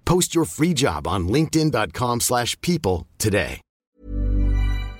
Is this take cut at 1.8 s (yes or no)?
no